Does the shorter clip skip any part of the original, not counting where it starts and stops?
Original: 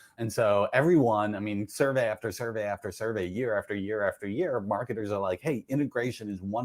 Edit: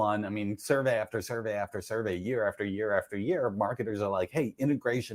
no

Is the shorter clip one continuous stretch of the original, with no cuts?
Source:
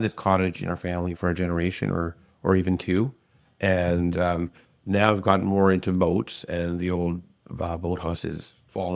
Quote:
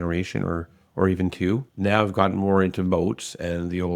no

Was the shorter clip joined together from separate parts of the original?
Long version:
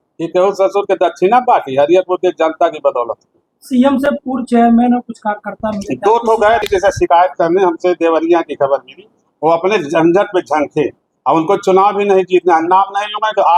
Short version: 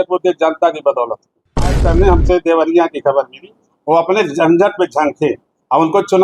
yes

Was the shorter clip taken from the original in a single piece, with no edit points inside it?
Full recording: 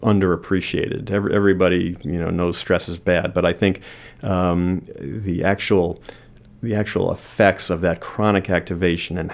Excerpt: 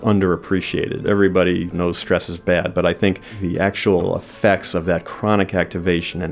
no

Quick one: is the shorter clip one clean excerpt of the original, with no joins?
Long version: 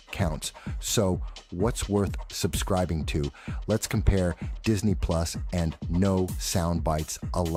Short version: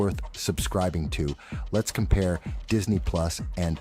yes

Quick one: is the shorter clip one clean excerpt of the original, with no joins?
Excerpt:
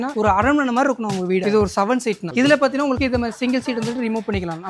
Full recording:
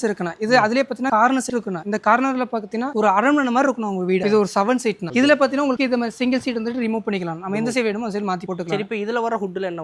yes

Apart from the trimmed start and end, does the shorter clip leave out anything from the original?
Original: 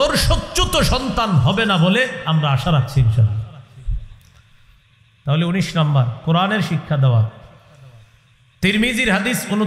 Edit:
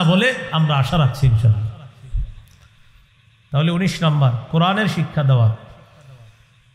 no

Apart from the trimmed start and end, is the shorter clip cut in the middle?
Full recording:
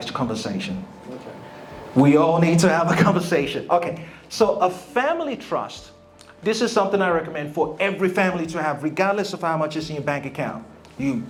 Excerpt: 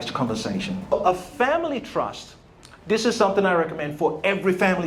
yes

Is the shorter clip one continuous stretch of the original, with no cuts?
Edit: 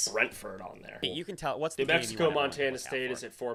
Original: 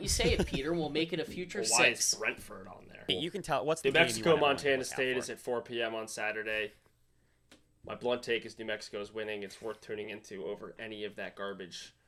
yes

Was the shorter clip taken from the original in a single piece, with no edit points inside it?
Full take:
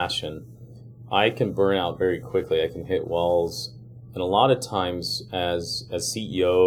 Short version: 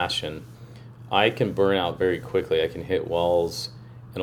yes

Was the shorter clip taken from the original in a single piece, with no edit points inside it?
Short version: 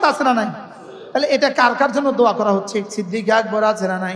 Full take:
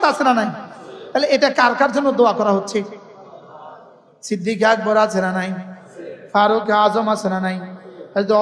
no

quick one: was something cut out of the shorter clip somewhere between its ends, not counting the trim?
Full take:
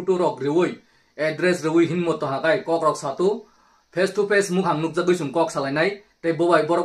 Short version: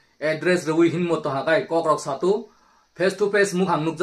no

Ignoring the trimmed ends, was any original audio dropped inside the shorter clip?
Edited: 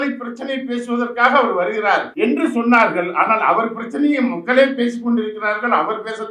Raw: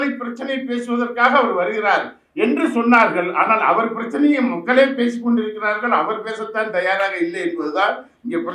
yes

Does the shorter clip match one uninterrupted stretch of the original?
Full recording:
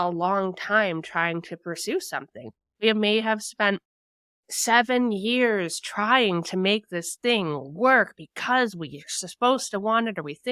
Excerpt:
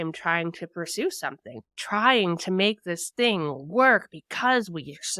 no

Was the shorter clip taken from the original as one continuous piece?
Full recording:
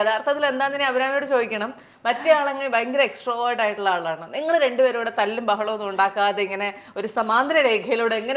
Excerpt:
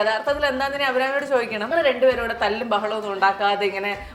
no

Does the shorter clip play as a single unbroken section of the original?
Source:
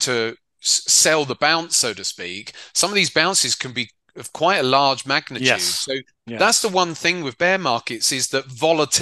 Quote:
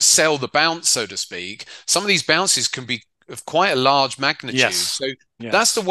yes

